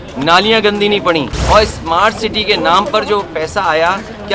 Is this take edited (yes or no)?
yes